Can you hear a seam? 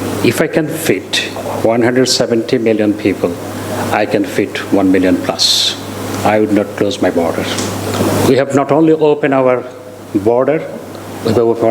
yes; 1 cut; at 7.8 s

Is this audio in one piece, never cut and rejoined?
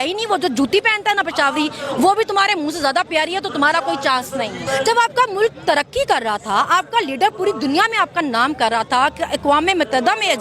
no; 1 cut; at 4.6 s

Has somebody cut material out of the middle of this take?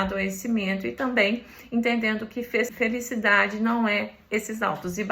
yes; 1 cut; at 2.7 s

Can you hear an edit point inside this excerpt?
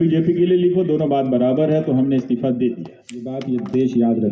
yes; 1 cut; at 3.3 s

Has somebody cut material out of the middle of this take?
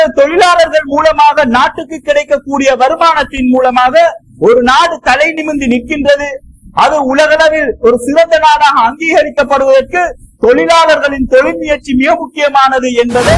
no; 0 cuts

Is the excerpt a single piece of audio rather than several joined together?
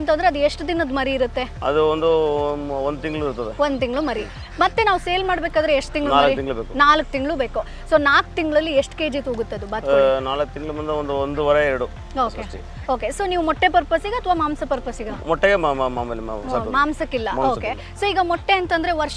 yes; 0 cuts

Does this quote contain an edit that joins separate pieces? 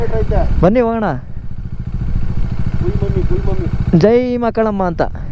no; 0 cuts

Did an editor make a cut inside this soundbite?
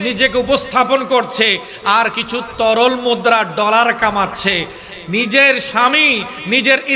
no; 0 cuts

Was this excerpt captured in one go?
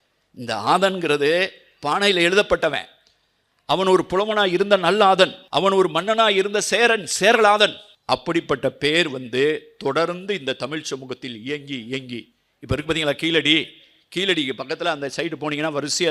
no; 2 cuts; at 5.4 s, 7.9 s

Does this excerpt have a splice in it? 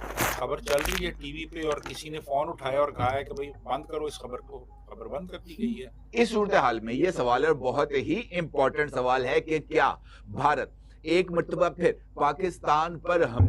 yes; 1 cut; at 6.0 s

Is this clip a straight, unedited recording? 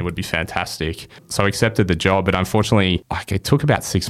no; 2 cuts; at 1.3 s, 3.1 s

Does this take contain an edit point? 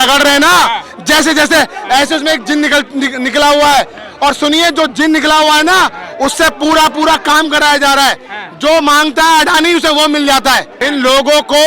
yes; 1 cut; at 10.7 s

